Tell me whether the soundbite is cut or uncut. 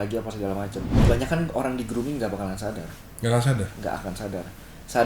cut